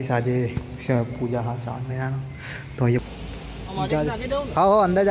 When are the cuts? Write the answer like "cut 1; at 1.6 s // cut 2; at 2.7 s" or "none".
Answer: cut 1; at 3.0 s